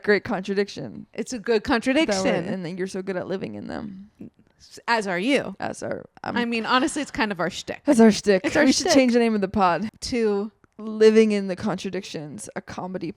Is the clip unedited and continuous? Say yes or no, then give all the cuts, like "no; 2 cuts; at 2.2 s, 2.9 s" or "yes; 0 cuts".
no; 1 cut; at 10.0 s